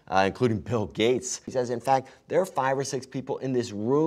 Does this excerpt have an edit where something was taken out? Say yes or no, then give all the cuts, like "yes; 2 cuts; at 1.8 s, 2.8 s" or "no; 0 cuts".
yes; 1 cut; at 1.5 s